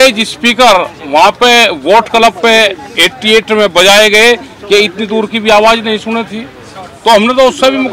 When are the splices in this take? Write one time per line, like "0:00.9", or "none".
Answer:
none